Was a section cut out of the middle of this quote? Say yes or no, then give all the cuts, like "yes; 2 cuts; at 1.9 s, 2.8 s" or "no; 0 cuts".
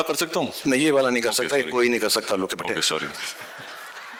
no; 0 cuts